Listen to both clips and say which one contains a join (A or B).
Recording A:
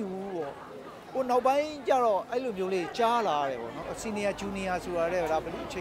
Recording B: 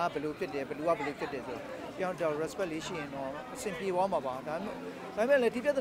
A